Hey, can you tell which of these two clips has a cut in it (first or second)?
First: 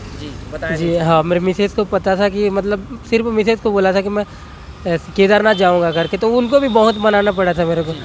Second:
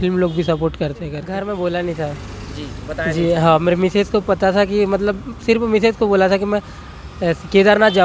second